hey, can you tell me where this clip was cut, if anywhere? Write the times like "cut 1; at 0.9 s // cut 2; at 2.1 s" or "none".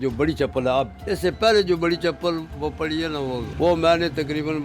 cut 1; at 1.0 s // cut 2; at 3.5 s

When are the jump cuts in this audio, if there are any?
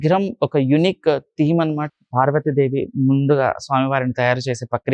cut 1; at 1.9 s

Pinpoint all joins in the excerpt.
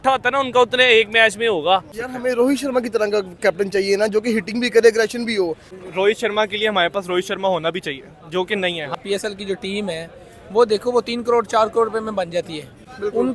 cut 1; at 2.1 s // cut 2; at 5.7 s // cut 3; at 9.0 s

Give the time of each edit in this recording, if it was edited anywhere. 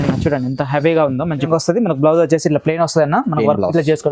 cut 1; at 1.5 s

